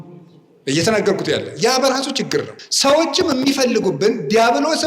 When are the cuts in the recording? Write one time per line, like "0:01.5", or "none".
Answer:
0:02.6